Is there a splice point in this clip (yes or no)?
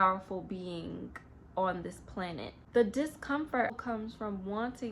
yes